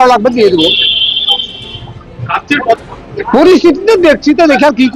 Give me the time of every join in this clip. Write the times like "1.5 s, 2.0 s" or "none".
none